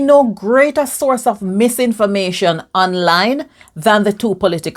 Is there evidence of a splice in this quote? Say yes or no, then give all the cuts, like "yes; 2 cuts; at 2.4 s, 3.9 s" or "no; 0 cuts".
no; 0 cuts